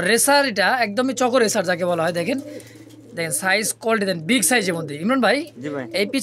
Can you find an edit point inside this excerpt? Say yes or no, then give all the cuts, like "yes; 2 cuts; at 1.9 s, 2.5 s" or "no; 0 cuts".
no; 0 cuts